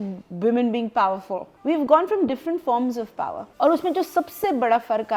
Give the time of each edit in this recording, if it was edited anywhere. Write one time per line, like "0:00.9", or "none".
0:01.5
0:03.4